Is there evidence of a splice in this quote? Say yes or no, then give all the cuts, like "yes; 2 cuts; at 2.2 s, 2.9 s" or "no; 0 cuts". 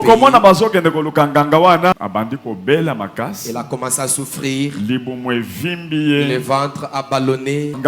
yes; 1 cut; at 1.9 s